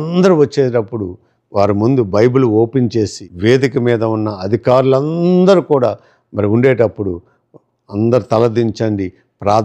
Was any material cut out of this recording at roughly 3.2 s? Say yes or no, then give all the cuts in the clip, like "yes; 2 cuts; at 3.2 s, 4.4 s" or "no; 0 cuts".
yes; 1 cut; at 3.2 s